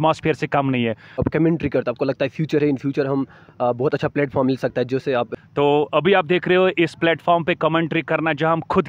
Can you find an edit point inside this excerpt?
yes; 2 cuts; at 1.2 s, 5.3 s

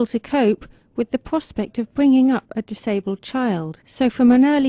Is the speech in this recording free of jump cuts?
no; 1 cut; at 2.2 s

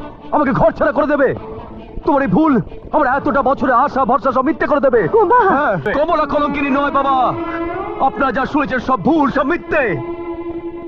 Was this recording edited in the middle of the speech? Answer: yes; 1 cut; at 5.9 s

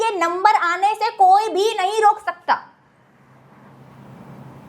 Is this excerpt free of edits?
yes; 0 cuts

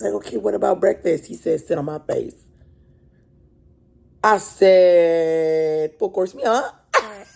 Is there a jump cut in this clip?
no; 0 cuts

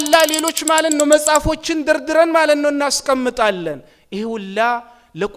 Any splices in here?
no; 0 cuts

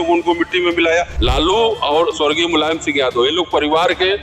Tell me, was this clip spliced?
yes; 1 cut; at 1.1 s

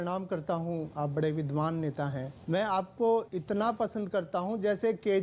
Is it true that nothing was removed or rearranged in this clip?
no; 3 cuts; at 0.9 s, 2.3 s, 3.3 s

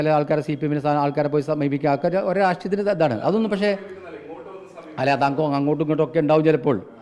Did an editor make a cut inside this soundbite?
no; 0 cuts

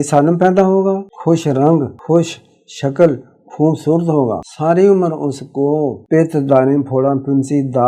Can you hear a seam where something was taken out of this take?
yes; 4 cuts; at 1.1 s, 1.9 s, 4.5 s, 6.0 s

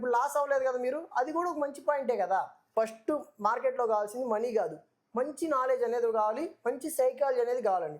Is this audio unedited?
no; 1 cut; at 2.6 s

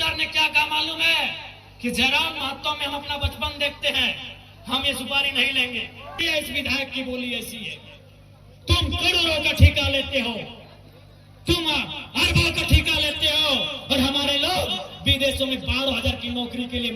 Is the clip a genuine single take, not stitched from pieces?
no; 1 cut; at 6.2 s

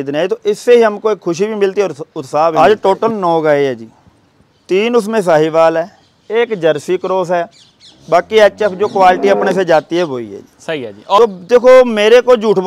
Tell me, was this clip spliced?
yes; 2 cuts; at 2.5 s, 11.2 s

